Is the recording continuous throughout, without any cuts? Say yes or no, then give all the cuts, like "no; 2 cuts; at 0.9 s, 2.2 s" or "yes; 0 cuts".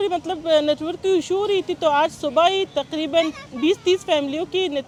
yes; 0 cuts